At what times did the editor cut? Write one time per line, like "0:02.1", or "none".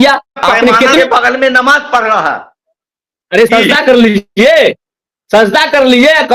0:01.0